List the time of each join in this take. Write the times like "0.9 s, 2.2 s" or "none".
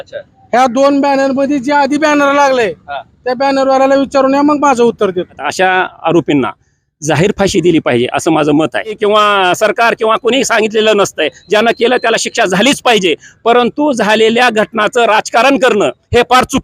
5.4 s, 9.0 s